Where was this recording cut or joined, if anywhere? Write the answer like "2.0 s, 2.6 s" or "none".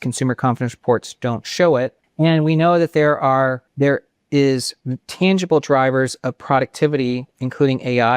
2.0 s, 3.6 s